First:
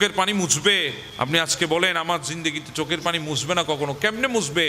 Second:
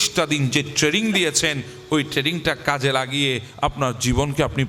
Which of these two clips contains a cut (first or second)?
first